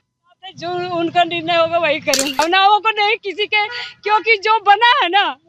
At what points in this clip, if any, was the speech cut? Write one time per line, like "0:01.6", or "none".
0:02.4

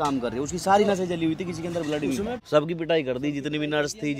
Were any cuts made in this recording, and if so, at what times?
0:02.4

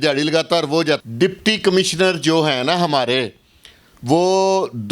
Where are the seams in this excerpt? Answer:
0:01.0

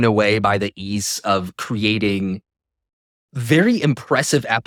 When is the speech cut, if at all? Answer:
none

